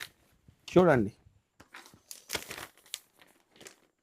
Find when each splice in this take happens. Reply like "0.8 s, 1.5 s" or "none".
none